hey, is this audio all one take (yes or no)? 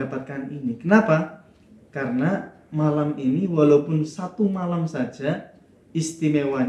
yes